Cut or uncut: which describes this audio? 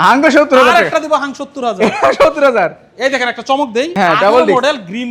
uncut